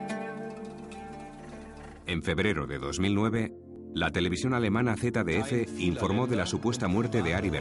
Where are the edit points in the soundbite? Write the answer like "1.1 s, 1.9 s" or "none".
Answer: 1.9 s